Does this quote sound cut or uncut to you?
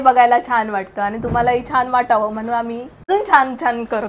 cut